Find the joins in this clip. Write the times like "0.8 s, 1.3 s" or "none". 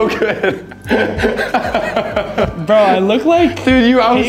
2.5 s